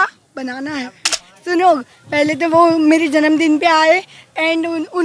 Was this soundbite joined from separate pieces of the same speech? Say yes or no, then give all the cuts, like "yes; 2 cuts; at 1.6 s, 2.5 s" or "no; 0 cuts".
yes; 1 cut; at 1.3 s